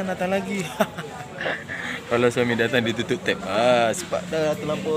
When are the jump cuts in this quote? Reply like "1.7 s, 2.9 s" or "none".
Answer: none